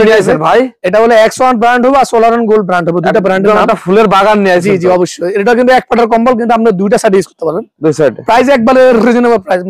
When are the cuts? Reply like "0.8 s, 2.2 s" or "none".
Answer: none